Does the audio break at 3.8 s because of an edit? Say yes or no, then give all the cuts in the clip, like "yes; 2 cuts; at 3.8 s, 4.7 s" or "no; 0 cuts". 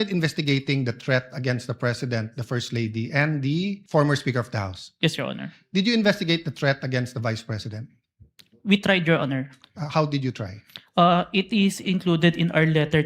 yes; 1 cut; at 3.8 s